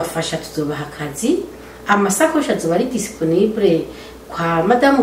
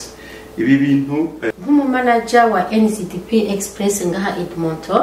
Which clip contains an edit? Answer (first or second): second